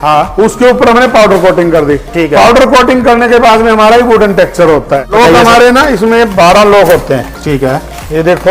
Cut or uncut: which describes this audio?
cut